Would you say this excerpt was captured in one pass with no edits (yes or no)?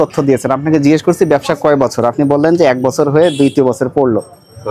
yes